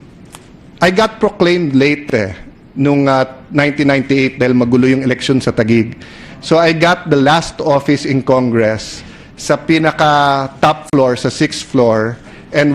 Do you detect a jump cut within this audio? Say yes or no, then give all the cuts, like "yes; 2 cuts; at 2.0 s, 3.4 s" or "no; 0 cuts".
yes; 1 cut; at 1.5 s